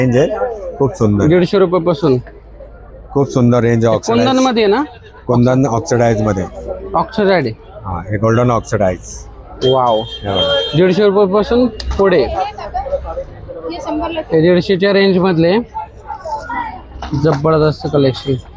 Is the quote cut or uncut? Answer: uncut